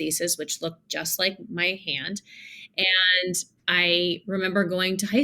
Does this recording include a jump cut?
yes; 1 cut; at 3.6 s

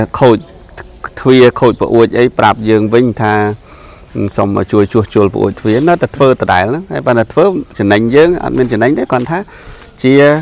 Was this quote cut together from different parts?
no; 0 cuts

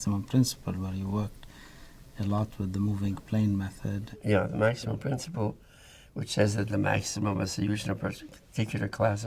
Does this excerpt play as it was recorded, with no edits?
no; 1 cut; at 4.1 s

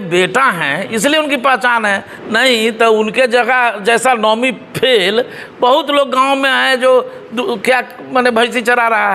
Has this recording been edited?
no; 0 cuts

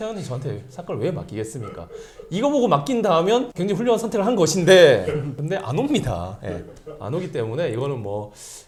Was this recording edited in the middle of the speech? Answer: no; 0 cuts

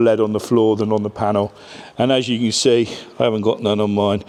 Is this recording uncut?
yes; 0 cuts

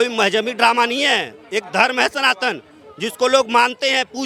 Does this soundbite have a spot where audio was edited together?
no; 0 cuts

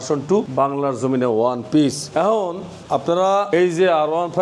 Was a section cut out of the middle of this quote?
no; 0 cuts

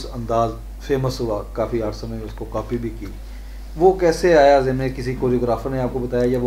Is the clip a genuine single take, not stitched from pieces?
yes; 0 cuts

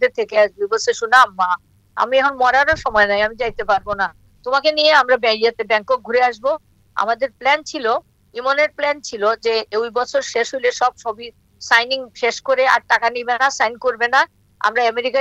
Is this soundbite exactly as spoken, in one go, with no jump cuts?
yes; 0 cuts

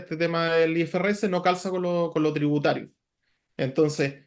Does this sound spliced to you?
no; 0 cuts

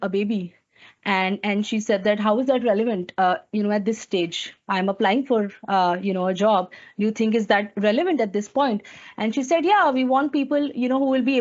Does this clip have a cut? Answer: no; 0 cuts

